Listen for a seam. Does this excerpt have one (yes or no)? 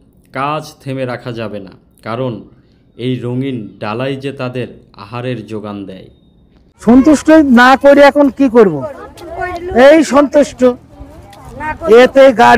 yes